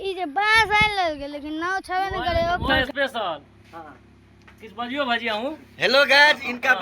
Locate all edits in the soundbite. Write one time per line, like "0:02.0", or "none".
0:02.7